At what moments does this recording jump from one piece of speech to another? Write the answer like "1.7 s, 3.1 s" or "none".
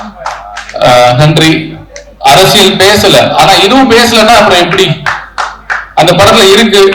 none